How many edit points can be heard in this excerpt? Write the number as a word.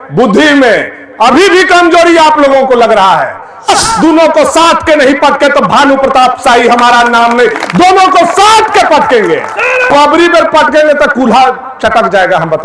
two